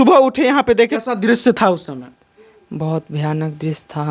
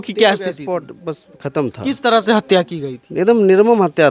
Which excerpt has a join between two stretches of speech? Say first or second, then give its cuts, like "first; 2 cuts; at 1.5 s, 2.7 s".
first; 1 cut; at 1.0 s